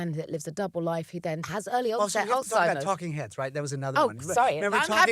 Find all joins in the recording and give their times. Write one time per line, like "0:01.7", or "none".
0:01.5